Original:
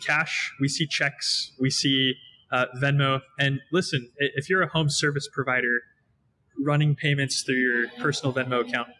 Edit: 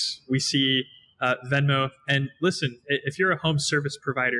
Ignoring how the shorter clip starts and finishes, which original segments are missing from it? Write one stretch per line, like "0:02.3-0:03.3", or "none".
none